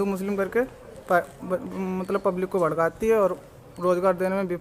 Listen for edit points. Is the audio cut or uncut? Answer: uncut